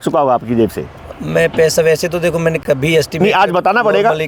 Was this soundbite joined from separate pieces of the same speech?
no; 0 cuts

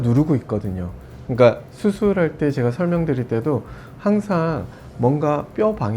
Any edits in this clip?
no; 0 cuts

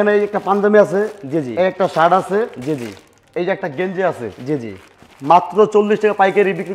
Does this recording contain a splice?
no; 0 cuts

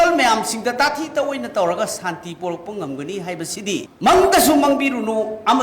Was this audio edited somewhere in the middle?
yes; 1 cut; at 3.9 s

